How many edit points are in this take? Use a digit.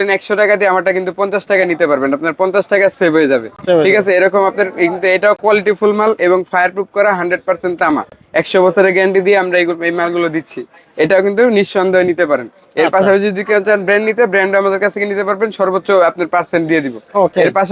0